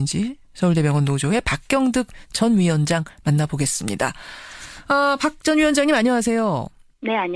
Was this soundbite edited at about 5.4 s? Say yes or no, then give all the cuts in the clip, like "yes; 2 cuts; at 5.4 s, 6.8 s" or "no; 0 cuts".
no; 0 cuts